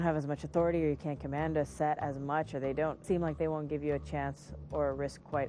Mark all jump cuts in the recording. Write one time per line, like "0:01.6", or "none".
0:03.0